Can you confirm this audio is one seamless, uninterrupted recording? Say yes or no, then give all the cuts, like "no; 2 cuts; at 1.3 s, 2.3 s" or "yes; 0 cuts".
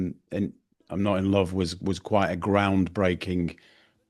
yes; 0 cuts